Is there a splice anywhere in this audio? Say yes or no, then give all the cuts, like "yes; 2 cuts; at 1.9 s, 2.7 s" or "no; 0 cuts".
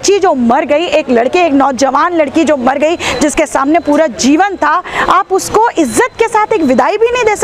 no; 0 cuts